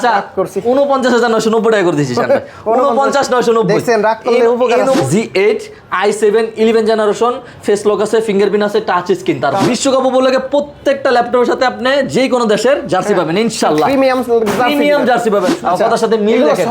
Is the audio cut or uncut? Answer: cut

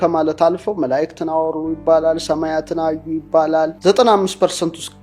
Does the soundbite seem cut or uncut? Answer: cut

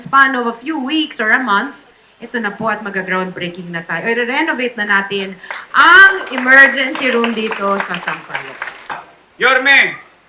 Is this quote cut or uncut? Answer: cut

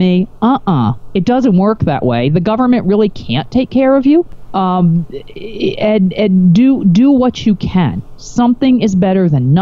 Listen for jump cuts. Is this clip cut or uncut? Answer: cut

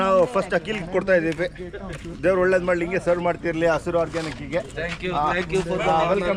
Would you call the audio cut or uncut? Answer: uncut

